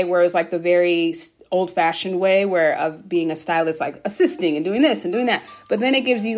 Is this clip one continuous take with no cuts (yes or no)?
yes